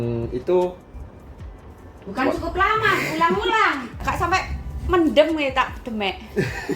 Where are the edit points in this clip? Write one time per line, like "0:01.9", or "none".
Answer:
0:03.9